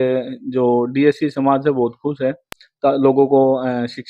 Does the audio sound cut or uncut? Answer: uncut